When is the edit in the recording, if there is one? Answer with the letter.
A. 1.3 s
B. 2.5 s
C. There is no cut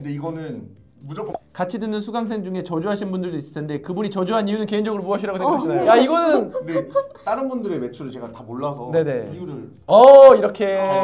A